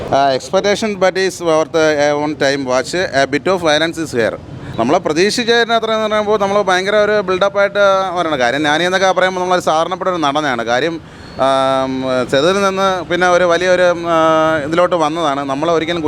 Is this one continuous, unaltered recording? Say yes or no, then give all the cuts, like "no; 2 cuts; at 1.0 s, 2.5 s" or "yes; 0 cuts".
yes; 0 cuts